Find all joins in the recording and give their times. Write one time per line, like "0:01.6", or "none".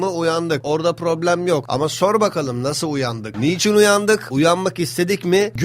0:03.2